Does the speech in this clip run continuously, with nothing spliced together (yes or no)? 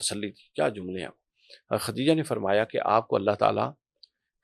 yes